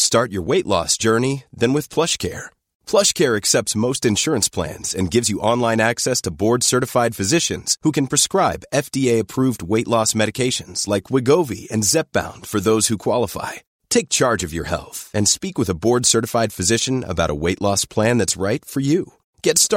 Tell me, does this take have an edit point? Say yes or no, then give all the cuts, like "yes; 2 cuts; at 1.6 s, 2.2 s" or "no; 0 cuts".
no; 0 cuts